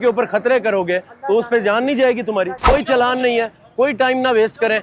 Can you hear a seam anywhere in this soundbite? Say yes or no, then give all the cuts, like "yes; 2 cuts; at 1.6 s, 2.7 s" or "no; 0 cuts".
yes; 1 cut; at 2.6 s